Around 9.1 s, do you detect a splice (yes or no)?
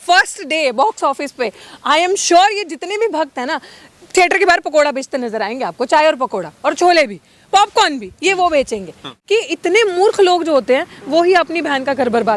yes